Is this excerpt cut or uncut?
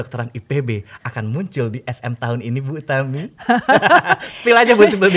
uncut